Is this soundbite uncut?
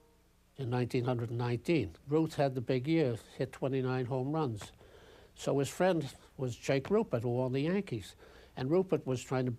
yes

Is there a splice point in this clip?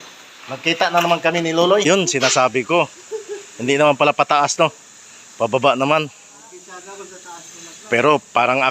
yes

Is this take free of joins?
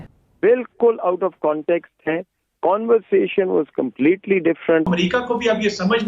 no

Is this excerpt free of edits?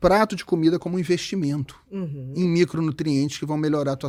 yes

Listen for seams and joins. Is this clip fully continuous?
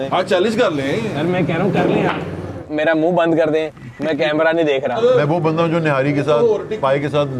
no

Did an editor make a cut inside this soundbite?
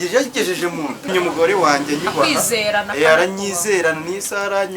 yes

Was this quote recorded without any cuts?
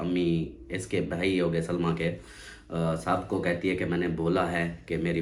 yes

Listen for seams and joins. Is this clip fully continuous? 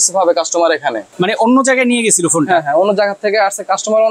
no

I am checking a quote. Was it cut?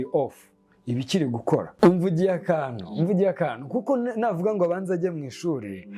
yes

